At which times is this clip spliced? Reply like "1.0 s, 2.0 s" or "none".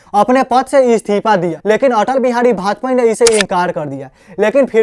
1.5 s

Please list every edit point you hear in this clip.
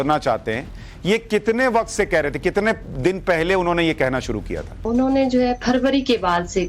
4.7 s

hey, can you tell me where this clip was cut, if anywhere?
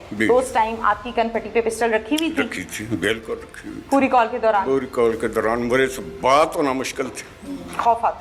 none

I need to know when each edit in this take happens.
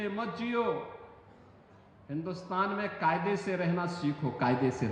none

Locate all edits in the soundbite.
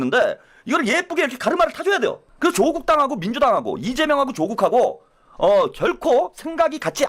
2.2 s

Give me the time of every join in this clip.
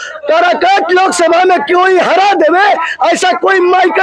none

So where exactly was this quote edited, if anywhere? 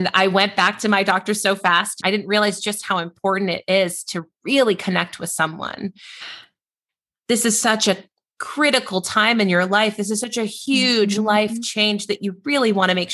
2.0 s

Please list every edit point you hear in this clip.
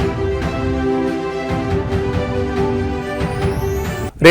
3.0 s

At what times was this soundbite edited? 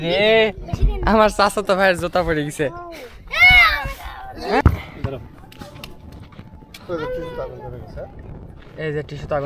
4.6 s

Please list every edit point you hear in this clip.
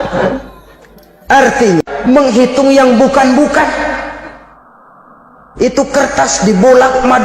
1.8 s

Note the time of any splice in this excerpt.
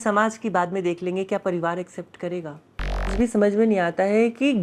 3.1 s

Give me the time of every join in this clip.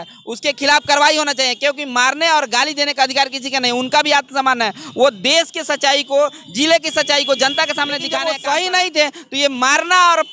8.1 s

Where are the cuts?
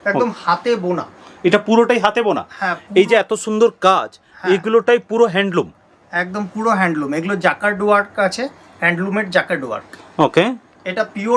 none

